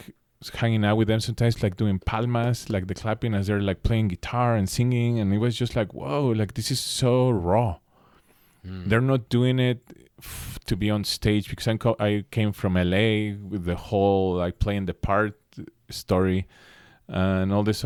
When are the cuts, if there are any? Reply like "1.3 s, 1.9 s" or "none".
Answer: none